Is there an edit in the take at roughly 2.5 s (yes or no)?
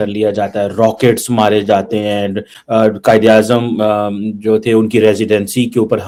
no